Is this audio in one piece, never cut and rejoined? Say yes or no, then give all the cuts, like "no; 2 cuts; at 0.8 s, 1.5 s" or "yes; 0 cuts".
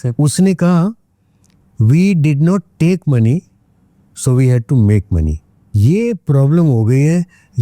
yes; 0 cuts